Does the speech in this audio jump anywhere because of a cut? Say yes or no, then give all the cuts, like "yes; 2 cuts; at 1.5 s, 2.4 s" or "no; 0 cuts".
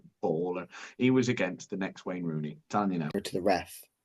yes; 1 cut; at 3.1 s